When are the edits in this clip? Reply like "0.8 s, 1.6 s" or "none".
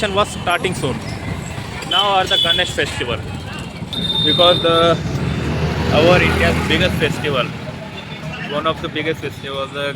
3.9 s